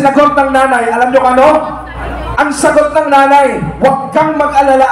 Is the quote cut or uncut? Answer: uncut